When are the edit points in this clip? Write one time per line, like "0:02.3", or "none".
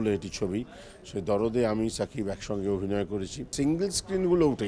0:03.5